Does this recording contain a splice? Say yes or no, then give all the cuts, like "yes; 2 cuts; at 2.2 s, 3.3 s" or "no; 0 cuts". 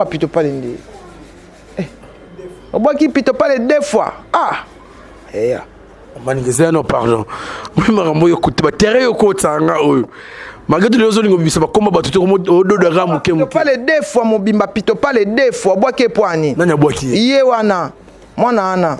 no; 0 cuts